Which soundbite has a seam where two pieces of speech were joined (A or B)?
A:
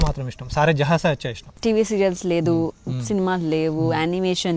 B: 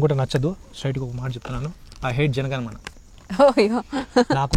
A